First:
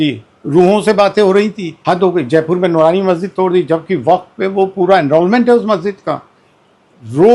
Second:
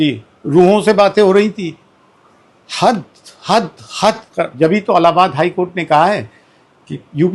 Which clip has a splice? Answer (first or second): first